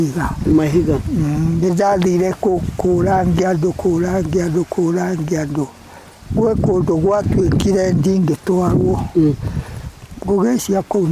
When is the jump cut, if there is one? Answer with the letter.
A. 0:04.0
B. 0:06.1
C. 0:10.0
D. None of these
D